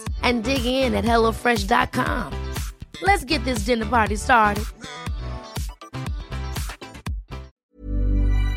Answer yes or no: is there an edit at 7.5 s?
yes